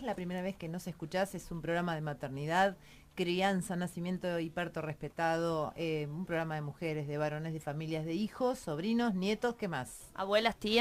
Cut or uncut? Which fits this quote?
cut